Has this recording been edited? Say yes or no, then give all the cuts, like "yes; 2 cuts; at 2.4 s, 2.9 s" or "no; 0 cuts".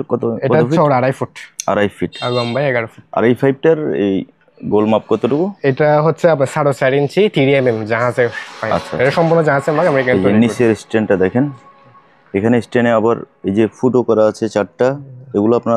no; 0 cuts